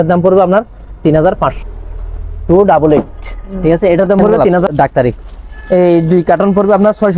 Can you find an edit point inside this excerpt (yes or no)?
yes